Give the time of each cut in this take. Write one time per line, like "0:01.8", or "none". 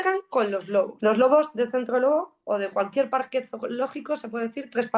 0:00.9